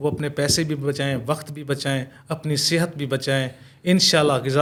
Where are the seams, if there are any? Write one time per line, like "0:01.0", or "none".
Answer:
none